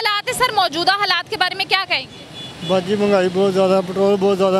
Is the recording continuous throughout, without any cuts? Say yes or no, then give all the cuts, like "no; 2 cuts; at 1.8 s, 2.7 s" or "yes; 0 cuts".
yes; 0 cuts